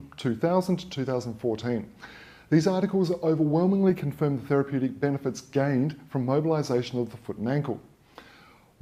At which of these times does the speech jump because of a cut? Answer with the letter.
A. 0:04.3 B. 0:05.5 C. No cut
C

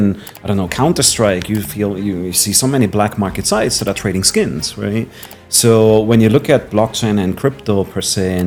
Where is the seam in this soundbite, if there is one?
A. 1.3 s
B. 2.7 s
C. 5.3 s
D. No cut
D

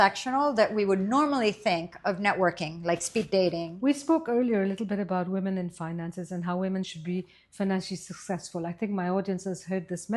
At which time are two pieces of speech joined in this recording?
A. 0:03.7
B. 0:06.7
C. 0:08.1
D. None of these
A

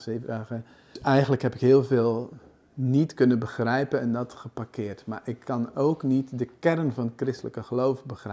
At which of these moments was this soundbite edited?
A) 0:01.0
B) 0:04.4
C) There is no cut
A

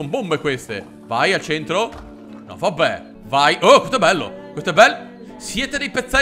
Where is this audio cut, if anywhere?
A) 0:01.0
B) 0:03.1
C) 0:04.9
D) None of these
B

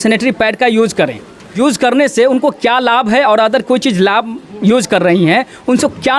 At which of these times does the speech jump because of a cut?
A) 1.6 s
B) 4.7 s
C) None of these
A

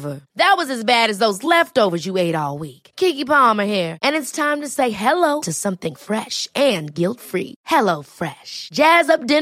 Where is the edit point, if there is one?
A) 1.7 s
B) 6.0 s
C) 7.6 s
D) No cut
D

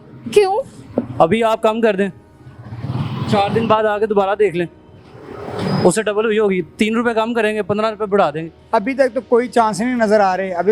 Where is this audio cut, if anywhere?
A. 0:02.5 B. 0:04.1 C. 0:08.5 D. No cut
C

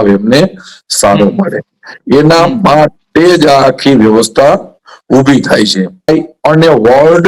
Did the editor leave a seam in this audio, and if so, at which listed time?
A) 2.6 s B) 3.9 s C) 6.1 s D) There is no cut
C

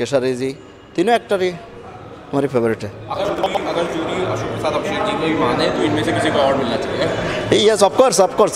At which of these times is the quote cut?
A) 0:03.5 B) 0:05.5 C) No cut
A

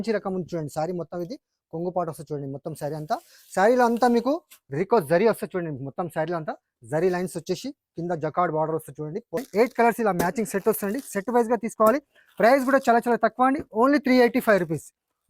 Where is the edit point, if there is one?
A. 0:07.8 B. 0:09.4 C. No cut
B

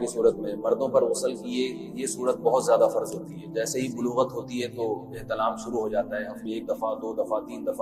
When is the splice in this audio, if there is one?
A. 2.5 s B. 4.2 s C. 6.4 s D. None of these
C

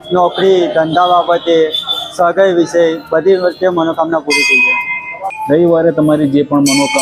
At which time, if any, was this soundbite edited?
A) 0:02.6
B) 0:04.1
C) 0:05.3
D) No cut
C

